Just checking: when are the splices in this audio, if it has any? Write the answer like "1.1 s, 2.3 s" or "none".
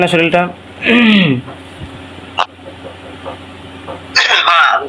2.6 s